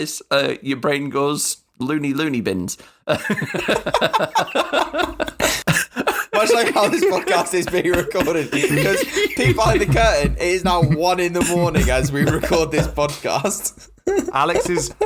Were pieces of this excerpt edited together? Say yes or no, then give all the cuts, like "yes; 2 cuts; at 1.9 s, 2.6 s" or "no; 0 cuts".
yes; 2 cuts; at 1.7 s, 5.8 s